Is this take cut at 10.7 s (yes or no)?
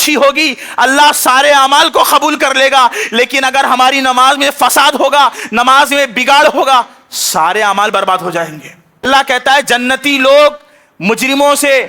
no